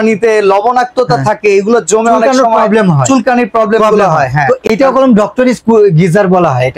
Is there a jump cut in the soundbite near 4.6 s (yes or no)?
yes